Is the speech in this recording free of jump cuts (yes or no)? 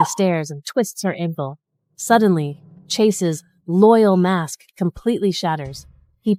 yes